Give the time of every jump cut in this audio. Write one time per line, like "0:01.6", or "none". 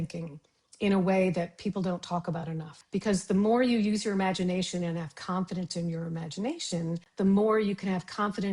0:02.7
0:07.1